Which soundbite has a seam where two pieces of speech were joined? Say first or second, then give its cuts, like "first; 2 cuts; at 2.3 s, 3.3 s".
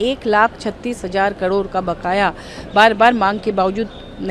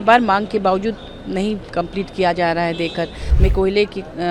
second; 1 cut; at 3.2 s